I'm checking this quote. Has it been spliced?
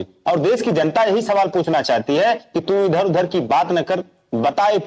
no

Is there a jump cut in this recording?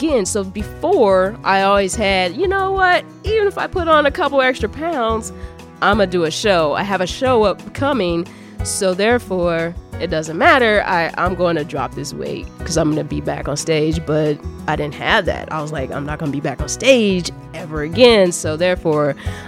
no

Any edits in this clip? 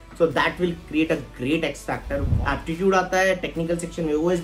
yes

